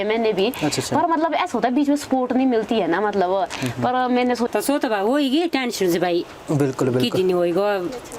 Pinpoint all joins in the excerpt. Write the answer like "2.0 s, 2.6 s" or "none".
4.5 s